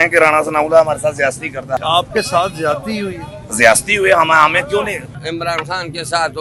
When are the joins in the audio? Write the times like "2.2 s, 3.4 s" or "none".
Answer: 1.8 s, 5.1 s